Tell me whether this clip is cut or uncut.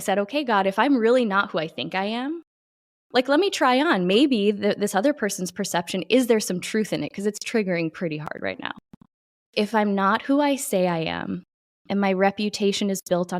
cut